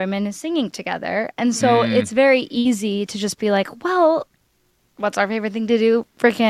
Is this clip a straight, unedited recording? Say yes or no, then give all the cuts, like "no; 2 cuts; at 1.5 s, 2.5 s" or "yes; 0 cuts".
yes; 0 cuts